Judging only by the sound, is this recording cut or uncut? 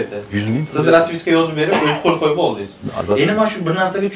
uncut